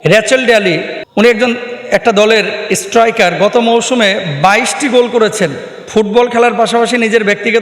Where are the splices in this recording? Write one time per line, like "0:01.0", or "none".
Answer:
0:01.0